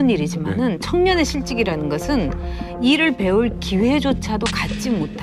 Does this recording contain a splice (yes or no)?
yes